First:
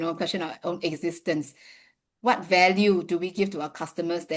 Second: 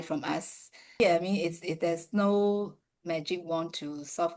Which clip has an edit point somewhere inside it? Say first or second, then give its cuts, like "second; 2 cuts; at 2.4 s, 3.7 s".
second; 1 cut; at 1.0 s